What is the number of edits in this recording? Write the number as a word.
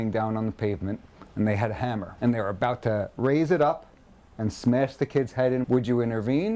two